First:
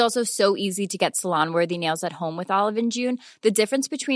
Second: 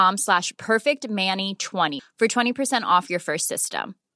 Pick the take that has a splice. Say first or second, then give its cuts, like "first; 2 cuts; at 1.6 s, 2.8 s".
second; 1 cut; at 1.9 s